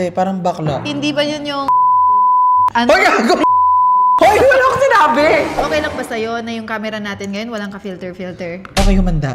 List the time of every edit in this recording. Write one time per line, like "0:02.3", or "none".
0:05.6